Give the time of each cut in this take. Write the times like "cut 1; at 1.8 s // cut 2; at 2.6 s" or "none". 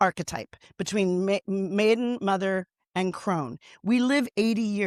none